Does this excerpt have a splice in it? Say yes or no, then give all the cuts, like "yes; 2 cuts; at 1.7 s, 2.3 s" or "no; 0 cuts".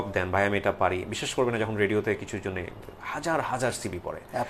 no; 0 cuts